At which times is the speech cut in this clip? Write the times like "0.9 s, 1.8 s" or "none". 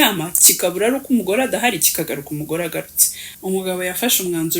3.0 s